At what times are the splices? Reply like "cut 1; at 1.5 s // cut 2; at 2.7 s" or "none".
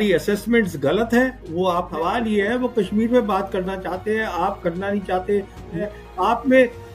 cut 1; at 1.9 s // cut 2; at 5.8 s

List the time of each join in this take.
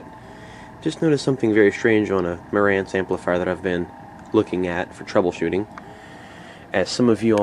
cut 1; at 1.8 s

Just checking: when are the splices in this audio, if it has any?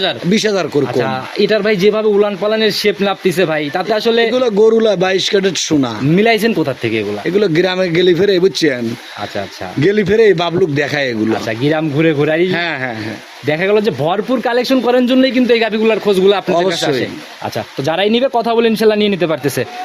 none

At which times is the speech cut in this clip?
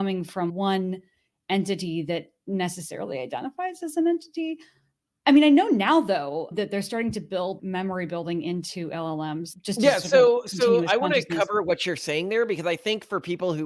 none

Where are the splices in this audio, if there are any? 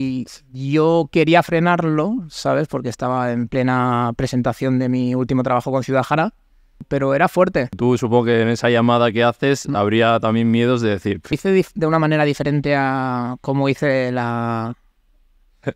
cut 1; at 6.8 s // cut 2; at 7.8 s // cut 3; at 11.4 s

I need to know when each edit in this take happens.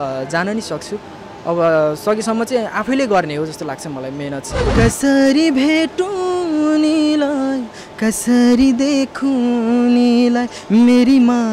cut 1; at 4.6 s

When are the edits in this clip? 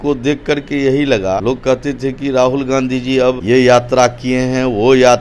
cut 1; at 1.4 s // cut 2; at 3.4 s

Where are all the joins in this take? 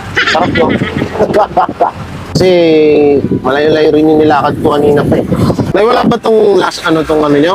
cut 1; at 2.3 s // cut 2; at 5.7 s

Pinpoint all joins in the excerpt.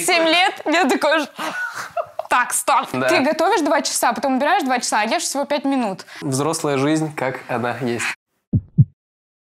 cut 1; at 2.9 s // cut 2; at 6.2 s

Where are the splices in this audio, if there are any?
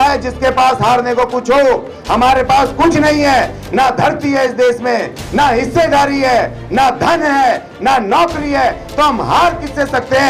none

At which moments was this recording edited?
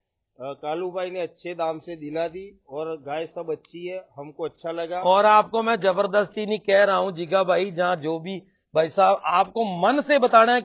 none

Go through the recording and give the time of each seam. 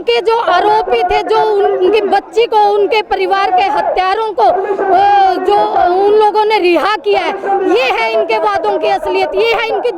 none

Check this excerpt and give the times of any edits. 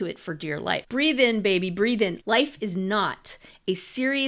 cut 1; at 0.9 s // cut 2; at 2.2 s

